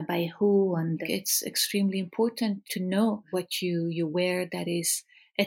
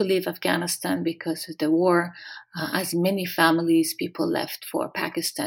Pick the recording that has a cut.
first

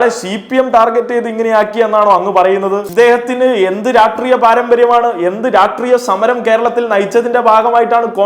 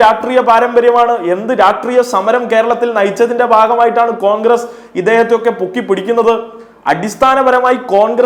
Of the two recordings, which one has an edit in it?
first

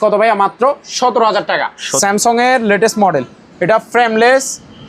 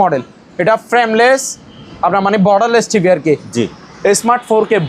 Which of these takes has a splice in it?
first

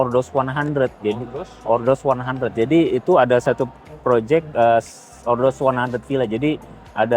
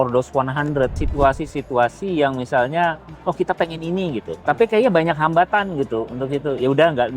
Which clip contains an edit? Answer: second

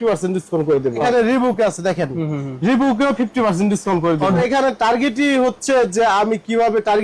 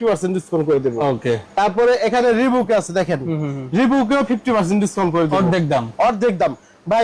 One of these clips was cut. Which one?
first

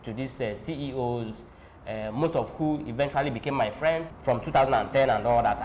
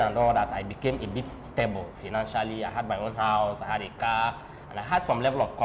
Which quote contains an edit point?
first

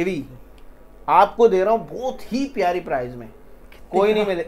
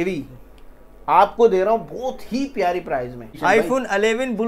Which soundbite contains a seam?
second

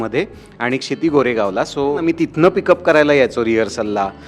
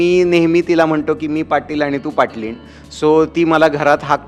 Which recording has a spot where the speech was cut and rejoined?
first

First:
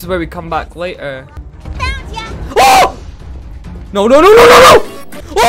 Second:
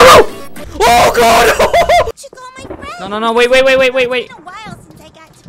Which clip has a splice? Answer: second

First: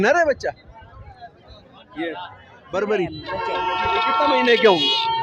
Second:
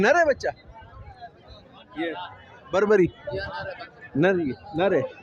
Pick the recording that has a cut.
first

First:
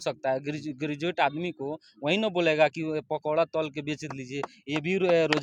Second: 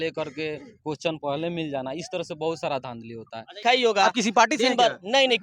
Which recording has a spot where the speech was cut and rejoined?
second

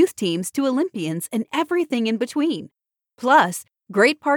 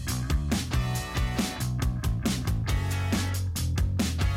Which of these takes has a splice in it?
second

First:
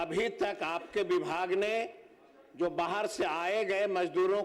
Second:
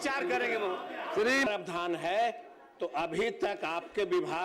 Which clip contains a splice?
second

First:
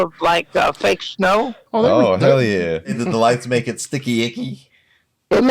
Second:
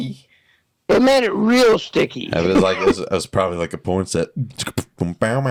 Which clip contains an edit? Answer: first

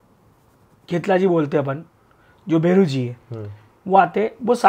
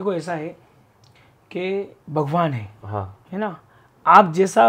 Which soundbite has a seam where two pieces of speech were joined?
second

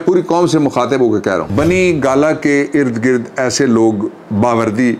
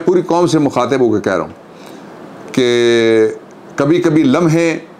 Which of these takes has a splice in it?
first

